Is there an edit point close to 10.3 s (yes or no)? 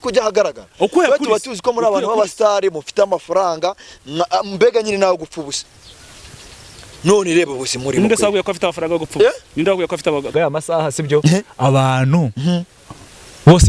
yes